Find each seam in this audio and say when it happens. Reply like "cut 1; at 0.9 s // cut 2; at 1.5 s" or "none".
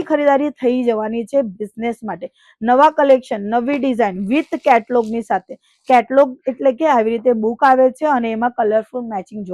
none